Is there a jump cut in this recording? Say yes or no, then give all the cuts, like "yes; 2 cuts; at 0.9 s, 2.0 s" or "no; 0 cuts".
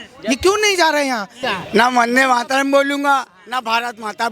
yes; 1 cut; at 1.4 s